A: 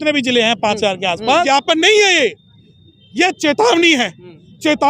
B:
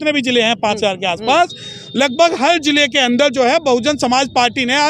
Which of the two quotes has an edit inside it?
A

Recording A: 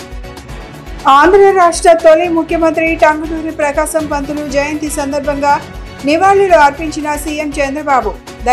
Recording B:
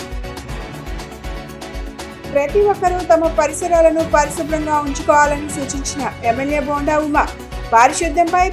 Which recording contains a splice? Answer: B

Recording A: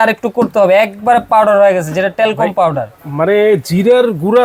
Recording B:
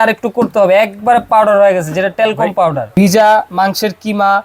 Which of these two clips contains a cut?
B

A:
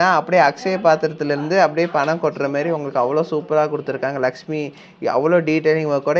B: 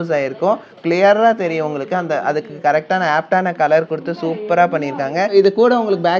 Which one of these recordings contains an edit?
B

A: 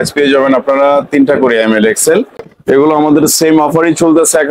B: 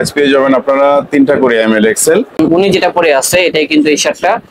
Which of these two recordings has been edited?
B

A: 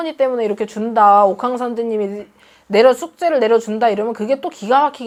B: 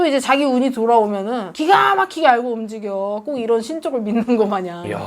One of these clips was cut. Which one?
B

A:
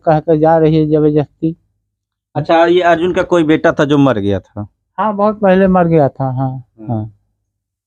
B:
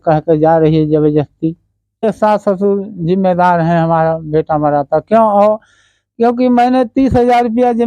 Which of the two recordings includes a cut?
B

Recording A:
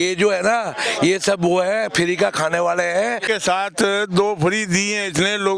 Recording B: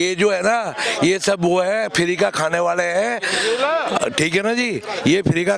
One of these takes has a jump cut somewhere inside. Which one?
A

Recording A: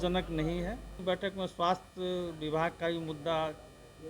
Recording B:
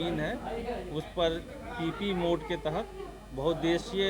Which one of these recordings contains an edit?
A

